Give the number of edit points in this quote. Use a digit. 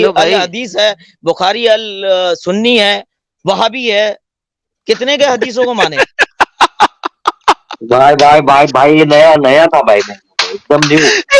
0